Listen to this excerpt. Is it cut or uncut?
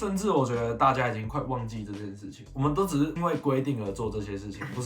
cut